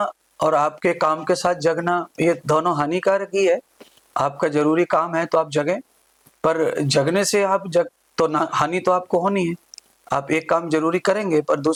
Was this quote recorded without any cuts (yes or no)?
yes